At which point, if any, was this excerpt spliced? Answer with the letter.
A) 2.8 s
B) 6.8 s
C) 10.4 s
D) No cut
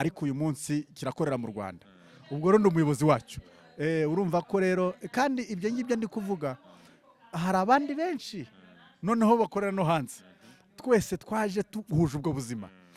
D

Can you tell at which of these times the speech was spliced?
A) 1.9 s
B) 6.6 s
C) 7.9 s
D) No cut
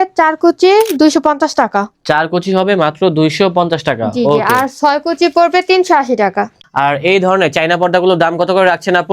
B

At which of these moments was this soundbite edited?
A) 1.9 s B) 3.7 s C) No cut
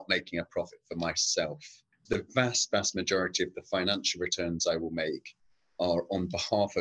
A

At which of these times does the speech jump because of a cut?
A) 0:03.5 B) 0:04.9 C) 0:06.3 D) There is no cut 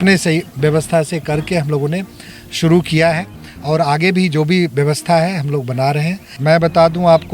C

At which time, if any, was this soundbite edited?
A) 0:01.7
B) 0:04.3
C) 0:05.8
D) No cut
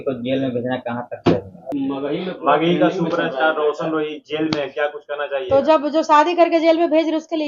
A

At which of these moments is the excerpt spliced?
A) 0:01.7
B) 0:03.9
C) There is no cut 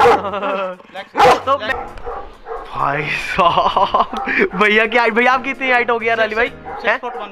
A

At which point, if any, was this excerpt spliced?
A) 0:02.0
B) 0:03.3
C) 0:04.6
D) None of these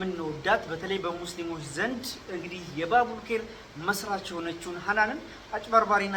D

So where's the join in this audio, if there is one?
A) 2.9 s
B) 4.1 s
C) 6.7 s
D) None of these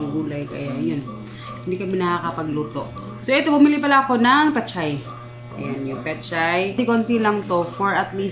C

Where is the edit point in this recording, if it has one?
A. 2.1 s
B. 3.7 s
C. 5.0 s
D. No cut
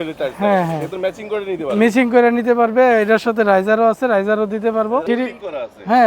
C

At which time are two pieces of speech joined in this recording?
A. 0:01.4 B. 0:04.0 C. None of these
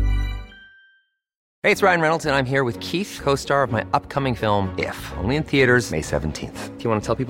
A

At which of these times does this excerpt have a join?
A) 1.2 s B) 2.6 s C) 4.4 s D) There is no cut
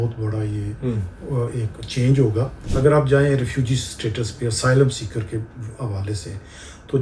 B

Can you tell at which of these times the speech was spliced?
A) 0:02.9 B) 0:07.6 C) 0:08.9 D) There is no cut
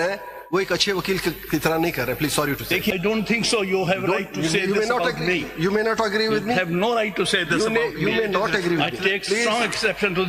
A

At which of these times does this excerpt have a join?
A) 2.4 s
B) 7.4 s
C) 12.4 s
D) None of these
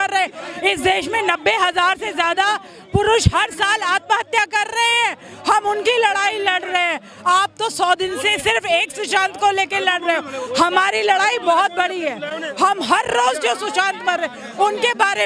D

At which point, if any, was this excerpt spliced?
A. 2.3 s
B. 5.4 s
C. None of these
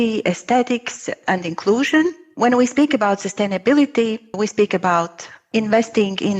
B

